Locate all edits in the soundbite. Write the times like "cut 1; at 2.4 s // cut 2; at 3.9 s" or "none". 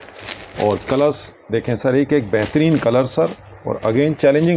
none